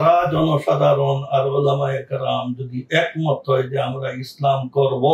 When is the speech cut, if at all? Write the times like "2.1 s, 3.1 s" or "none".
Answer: none